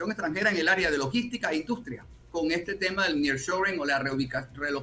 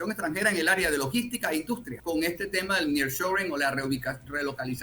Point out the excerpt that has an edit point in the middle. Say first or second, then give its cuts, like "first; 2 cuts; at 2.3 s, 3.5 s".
second; 1 cut; at 1.9 s